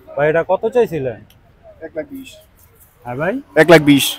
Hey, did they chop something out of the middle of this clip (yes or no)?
no